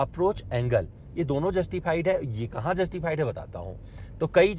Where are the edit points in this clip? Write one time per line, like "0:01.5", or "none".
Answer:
none